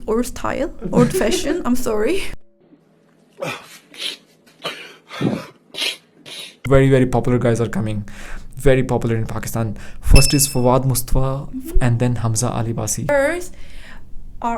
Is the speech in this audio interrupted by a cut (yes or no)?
yes